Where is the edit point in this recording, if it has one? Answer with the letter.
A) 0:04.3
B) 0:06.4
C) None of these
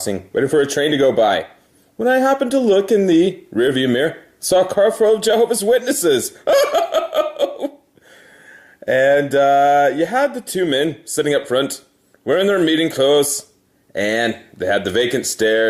A